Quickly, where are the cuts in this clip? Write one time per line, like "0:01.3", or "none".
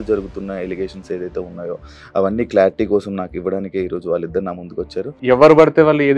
0:05.1